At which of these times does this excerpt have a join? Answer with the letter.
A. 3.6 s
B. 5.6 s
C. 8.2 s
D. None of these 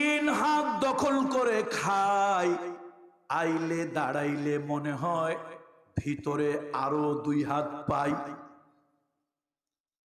D